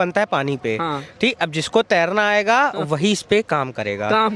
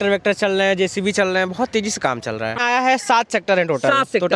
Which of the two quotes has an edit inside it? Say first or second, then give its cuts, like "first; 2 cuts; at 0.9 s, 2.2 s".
second; 1 cut; at 2.6 s